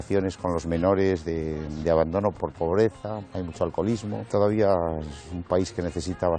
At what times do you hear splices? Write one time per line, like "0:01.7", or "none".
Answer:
0:02.4
0:03.2
0:04.3